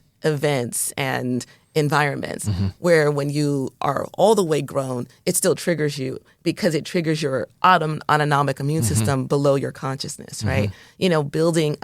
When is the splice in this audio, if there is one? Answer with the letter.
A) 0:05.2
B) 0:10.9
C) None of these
B